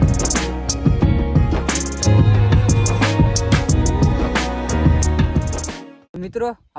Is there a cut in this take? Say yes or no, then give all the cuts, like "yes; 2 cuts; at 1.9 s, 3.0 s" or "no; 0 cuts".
no; 0 cuts